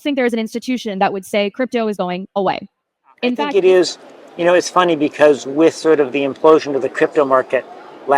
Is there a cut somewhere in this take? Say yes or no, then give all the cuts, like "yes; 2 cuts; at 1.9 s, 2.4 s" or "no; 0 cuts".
yes; 1 cut; at 3.1 s